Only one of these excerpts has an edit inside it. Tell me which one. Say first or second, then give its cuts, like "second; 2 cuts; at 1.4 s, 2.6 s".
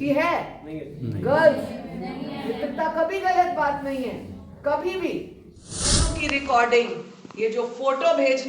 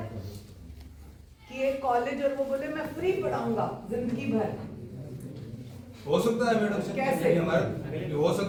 first; 1 cut; at 6.0 s